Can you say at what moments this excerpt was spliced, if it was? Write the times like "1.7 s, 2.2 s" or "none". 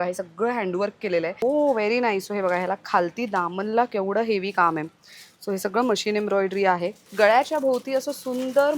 1.4 s, 7.0 s